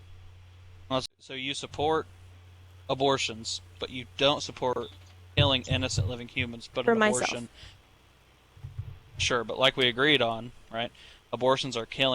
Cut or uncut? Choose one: cut